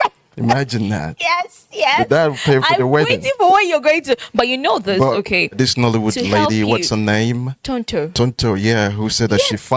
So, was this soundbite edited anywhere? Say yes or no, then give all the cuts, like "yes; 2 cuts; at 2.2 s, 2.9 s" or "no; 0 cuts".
yes; 2 cuts; at 5.5 s, 7.5 s